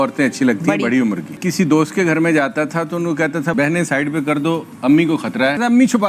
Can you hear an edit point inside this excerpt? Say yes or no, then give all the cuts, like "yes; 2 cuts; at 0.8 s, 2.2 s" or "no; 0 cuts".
no; 0 cuts